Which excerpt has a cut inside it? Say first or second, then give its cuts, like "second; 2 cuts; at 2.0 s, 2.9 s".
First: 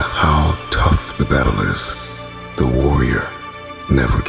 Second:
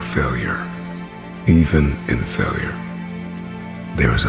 second; 1 cut; at 1.2 s